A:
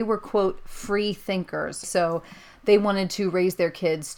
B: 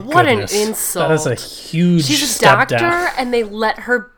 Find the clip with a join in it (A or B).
A